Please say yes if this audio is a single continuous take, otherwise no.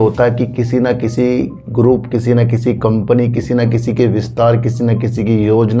yes